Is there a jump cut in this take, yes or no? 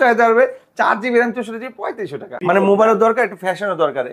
yes